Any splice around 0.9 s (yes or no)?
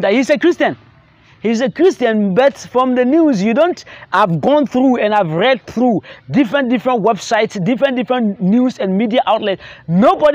no